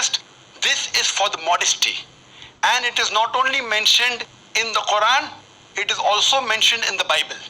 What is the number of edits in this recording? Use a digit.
1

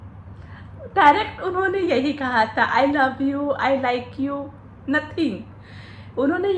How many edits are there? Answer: 0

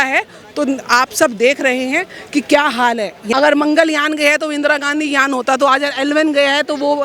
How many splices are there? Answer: 1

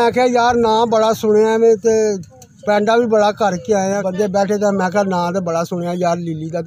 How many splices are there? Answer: 1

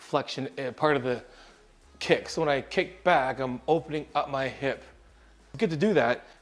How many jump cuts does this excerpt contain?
1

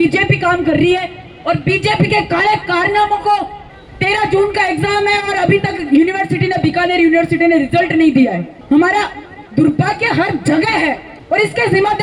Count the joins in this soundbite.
3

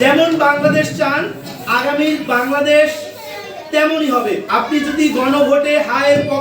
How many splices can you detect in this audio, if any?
1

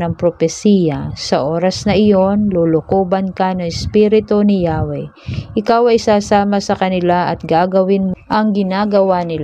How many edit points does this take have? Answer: 1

